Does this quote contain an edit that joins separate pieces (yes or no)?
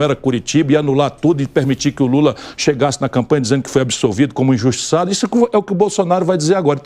no